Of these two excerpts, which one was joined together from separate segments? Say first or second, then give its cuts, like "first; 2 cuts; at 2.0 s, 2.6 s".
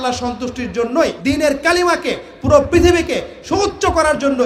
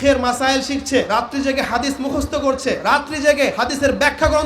second; 3 cuts; at 1.1 s, 2.8 s, 3.5 s